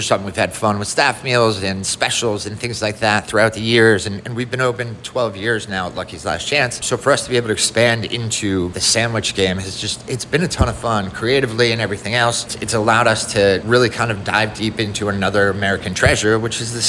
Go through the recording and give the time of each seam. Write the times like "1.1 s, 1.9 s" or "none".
6.8 s, 8.8 s, 12.5 s, 13.6 s

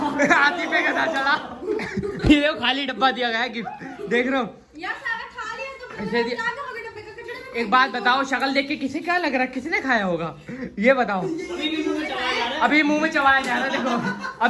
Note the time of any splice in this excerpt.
1.7 s

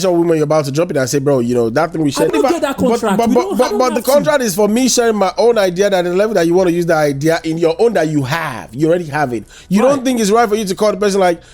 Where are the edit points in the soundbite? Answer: 2.3 s

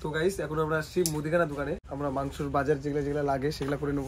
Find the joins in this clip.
1.9 s

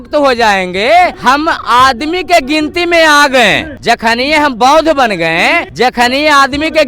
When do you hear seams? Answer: 1.2 s, 3.7 s, 5.7 s

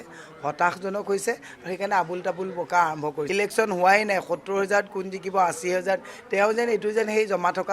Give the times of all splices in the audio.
3.3 s

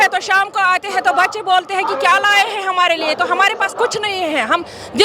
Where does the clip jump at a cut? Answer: none

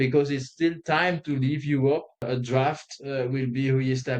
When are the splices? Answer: 2.2 s

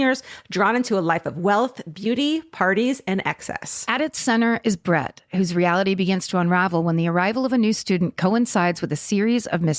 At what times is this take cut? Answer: none

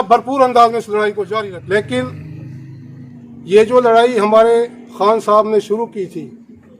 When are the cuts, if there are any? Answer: 1.3 s

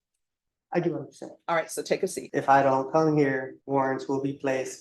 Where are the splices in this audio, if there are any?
1.8 s, 3.5 s

